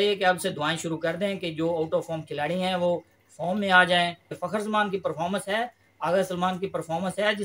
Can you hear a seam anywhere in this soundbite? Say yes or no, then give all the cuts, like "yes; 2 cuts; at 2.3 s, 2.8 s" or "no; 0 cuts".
yes; 1 cut; at 4.4 s